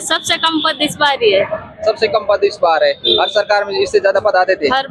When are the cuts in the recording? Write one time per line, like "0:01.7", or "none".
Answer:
none